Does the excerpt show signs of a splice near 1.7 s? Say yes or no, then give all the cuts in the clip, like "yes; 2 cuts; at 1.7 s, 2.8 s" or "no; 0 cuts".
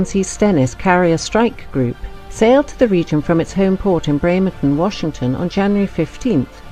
no; 1 cut; at 4.5 s